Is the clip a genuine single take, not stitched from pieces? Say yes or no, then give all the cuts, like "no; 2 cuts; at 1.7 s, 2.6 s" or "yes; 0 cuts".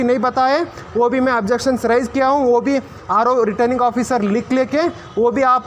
yes; 0 cuts